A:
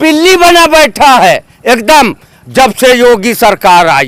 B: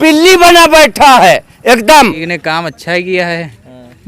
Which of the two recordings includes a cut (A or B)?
B